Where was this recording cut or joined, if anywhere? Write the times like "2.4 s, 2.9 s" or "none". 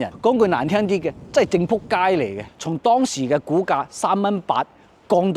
2.4 s